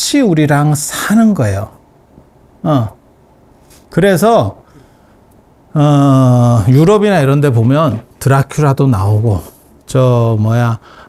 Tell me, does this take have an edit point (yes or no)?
no